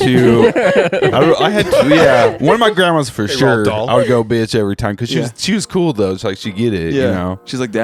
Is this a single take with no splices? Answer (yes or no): yes